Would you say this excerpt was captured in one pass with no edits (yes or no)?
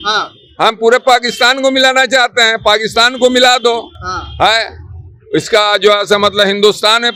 yes